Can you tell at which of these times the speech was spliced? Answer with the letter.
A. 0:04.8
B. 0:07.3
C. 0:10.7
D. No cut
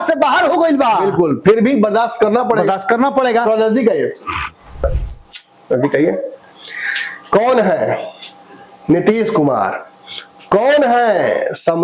A